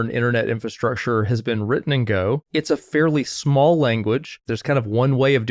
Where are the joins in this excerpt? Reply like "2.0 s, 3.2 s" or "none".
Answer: 2.5 s, 4.5 s